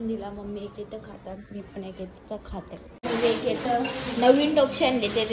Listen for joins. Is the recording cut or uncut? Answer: cut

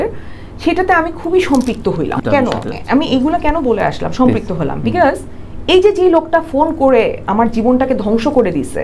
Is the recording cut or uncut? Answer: cut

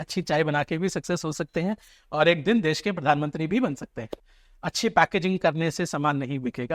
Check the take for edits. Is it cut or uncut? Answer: cut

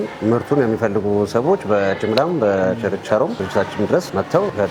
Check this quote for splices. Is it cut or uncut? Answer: uncut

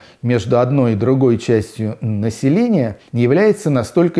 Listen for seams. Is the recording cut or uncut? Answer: cut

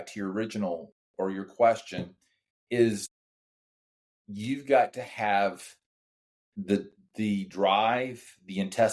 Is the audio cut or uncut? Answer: uncut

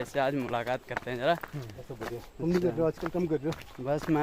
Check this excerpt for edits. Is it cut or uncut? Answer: cut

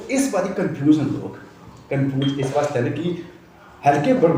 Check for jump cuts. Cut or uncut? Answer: uncut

